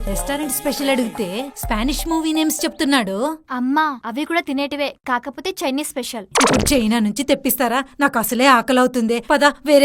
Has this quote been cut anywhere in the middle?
no; 0 cuts

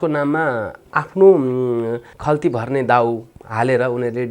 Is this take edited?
yes; 1 cut; at 2.1 s

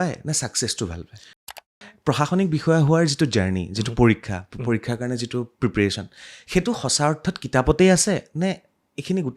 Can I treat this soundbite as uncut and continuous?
no; 1 cut; at 1.3 s

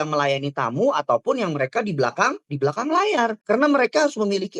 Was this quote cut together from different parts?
yes; 1 cut; at 3.4 s

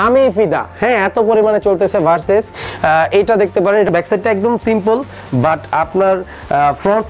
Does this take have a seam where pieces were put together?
yes; 1 cut; at 3.9 s

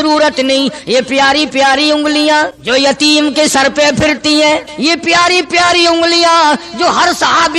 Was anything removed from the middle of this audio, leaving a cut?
yes; 2 cuts; at 2.6 s, 4.7 s

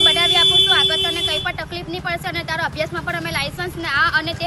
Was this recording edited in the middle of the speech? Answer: no; 0 cuts

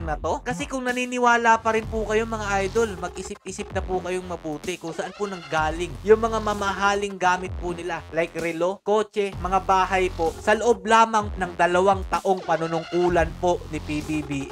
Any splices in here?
no; 0 cuts

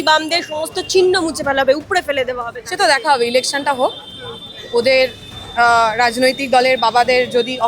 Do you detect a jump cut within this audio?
no; 0 cuts

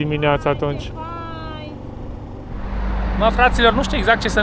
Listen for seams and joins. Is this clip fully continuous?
no; 1 cut; at 2.6 s

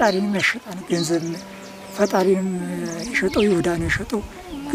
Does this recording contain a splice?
no; 0 cuts

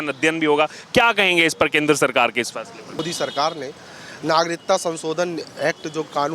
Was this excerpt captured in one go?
no; 1 cut; at 3.0 s

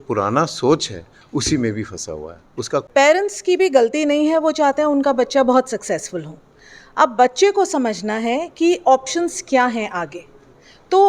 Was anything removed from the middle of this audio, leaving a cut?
yes; 1 cut; at 2.8 s

